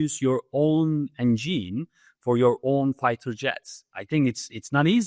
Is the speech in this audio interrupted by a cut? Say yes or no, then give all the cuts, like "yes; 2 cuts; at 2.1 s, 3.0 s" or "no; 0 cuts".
no; 0 cuts